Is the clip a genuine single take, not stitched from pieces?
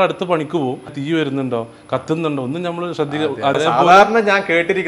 no; 2 cuts; at 1.0 s, 3.5 s

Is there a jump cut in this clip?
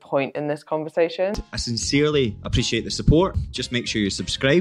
no; 0 cuts

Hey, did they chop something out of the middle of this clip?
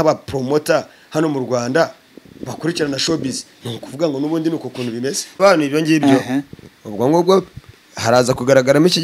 yes; 1 cut; at 5.3 s

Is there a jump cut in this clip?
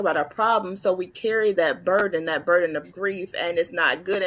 no; 0 cuts

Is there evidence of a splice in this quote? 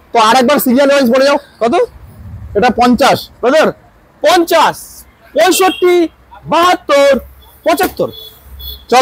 no; 0 cuts

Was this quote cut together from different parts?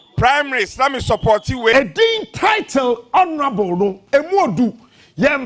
yes; 1 cut; at 1.7 s

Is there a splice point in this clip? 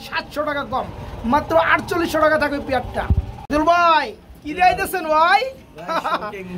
no; 0 cuts

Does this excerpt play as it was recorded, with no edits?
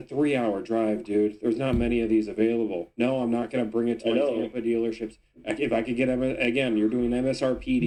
yes; 0 cuts

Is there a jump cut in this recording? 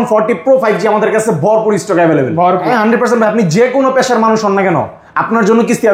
yes; 1 cut; at 2.7 s

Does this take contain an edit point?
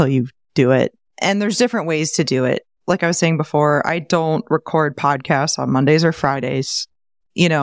yes; 2 cuts; at 1.1 s, 2.7 s

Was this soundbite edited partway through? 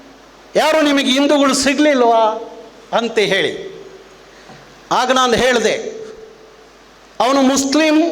no; 0 cuts

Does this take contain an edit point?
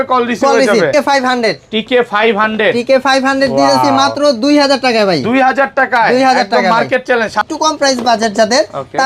yes; 2 cuts; at 0.9 s, 7.4 s

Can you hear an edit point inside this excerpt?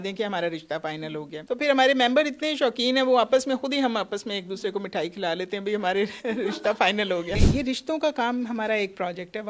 yes; 2 cuts; at 1.3 s, 7.4 s

